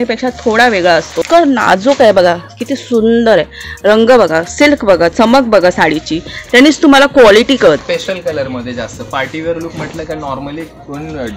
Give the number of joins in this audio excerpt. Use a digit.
2